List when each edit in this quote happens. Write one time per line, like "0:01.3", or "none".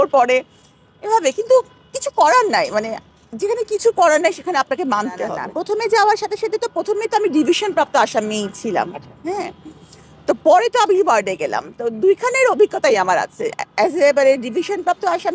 0:05.5